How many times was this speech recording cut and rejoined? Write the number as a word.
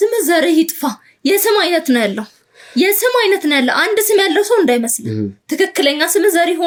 zero